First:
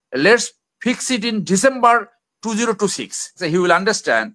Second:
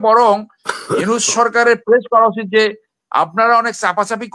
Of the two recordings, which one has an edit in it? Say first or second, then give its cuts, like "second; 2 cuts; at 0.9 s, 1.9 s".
first; 1 cut; at 3.4 s